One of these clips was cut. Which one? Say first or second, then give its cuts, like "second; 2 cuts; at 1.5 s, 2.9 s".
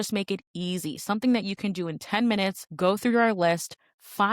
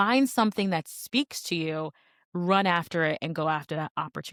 first; 1 cut; at 2.7 s